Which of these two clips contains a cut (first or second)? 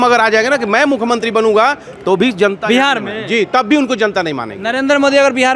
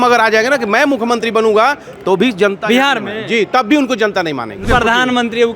second